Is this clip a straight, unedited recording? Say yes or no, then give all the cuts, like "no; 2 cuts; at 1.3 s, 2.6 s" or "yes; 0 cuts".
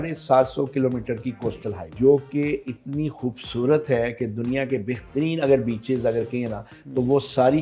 no; 1 cut; at 1.9 s